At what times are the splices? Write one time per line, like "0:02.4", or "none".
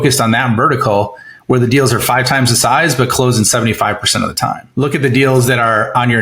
0:04.6